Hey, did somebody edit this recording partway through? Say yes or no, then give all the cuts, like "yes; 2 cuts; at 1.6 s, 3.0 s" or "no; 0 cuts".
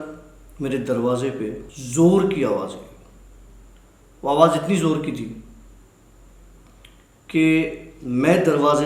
yes; 1 cut; at 1.7 s